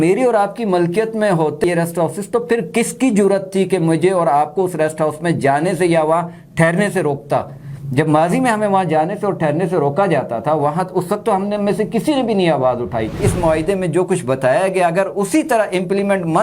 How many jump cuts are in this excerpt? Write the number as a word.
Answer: two